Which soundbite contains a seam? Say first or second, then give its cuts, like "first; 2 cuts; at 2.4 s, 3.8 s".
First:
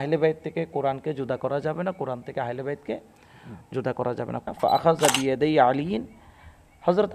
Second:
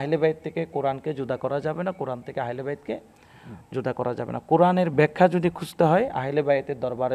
first; 1 cut; at 4.4 s